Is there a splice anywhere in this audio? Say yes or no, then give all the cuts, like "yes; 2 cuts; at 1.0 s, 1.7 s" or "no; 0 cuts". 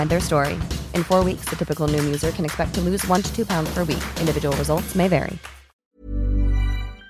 yes; 1 cut; at 6.0 s